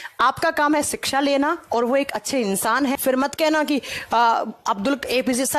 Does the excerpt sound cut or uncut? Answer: cut